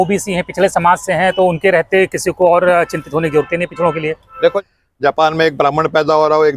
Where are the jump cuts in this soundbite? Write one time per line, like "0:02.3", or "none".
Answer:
0:04.6